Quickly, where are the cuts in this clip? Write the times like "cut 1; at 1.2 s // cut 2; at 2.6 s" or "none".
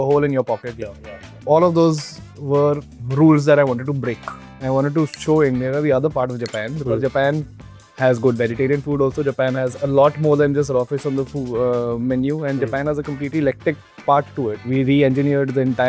cut 1; at 0.9 s // cut 2; at 3.0 s // cut 3; at 4.5 s // cut 4; at 14.6 s